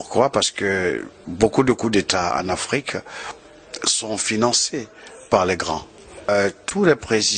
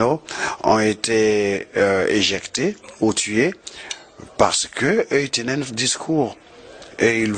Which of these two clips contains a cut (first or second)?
first